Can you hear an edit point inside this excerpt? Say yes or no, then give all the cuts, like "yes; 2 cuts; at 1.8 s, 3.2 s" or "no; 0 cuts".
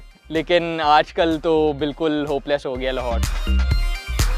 yes; 1 cut; at 3.2 s